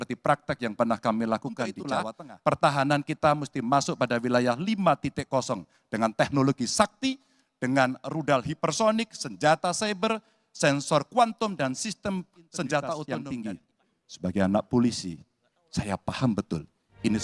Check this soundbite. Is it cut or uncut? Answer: cut